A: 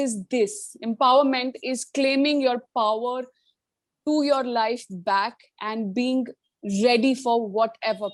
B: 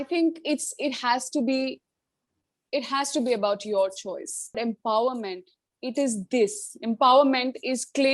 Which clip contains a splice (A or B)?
B